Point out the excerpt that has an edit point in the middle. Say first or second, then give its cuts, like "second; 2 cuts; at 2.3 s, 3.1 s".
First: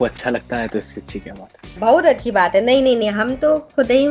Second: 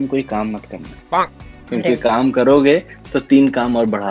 first; 1 cut; at 1.8 s